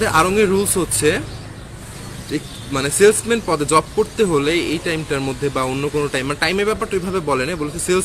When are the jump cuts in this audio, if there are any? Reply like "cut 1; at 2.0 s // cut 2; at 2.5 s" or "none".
none